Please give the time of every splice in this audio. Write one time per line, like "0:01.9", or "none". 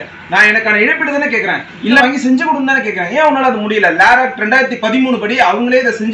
0:02.0